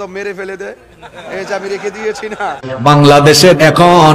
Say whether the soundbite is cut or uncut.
cut